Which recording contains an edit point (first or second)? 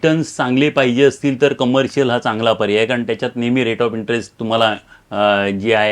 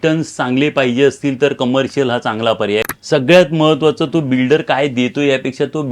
second